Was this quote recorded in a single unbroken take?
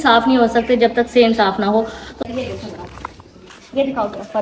no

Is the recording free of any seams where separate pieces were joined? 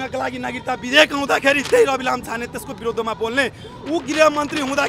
yes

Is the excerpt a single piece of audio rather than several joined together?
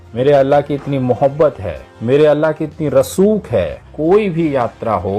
no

